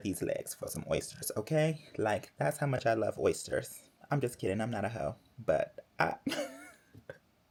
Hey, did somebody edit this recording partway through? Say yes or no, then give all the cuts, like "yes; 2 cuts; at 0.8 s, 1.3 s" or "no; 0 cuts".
no; 0 cuts